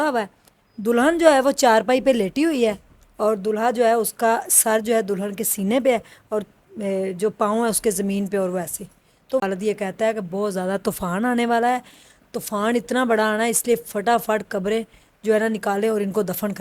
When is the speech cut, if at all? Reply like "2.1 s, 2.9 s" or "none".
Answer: 9.4 s

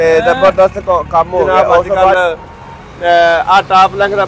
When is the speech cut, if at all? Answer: 2.1 s

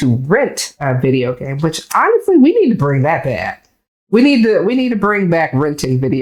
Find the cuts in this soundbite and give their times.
none

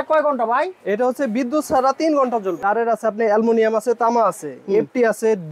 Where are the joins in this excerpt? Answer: 2.6 s

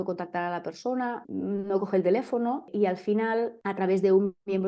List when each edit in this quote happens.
1.2 s, 2.7 s, 3.6 s

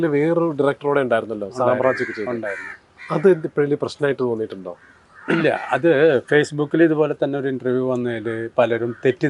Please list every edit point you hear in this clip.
none

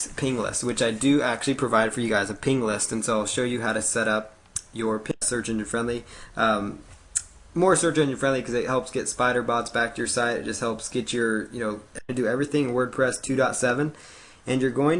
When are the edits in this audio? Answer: 5.1 s, 12.0 s

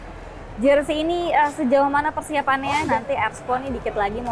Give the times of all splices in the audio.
2.8 s

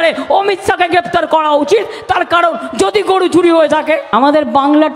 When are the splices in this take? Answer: 4.1 s

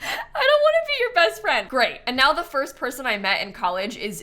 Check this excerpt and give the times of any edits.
1.6 s

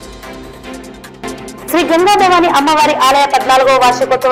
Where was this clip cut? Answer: none

